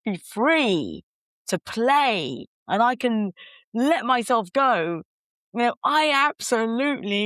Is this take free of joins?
yes; 0 cuts

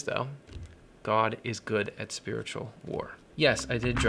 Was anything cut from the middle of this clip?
yes; 1 cut; at 3.2 s

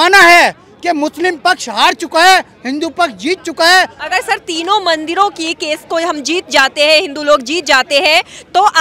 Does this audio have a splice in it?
yes; 1 cut; at 4.0 s

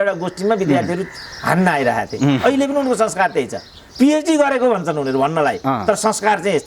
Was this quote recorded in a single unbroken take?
yes; 0 cuts

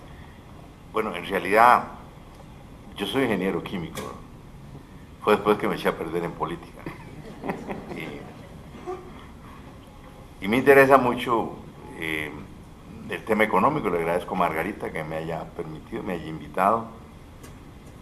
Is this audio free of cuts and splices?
yes; 0 cuts

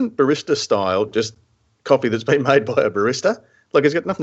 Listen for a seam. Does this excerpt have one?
no; 0 cuts

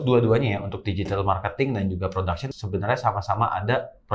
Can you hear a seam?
no; 0 cuts

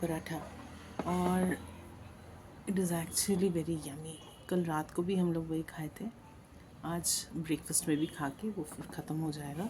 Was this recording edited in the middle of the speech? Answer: no; 0 cuts

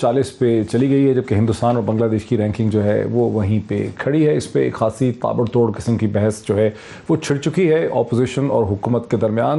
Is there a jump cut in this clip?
no; 0 cuts

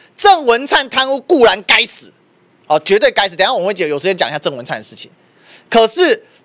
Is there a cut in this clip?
no; 0 cuts

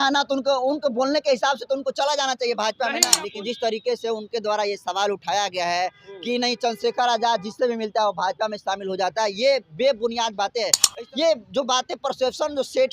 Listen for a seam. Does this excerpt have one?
yes; 2 cuts; at 3.2 s, 10.8 s

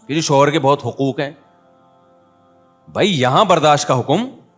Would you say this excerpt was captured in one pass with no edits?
yes; 0 cuts

